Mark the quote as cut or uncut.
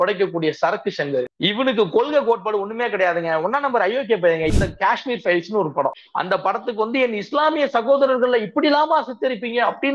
cut